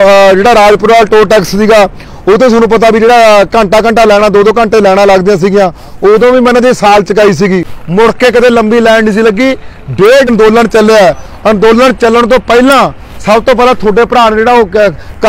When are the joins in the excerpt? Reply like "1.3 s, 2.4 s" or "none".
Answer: 7.7 s, 10.3 s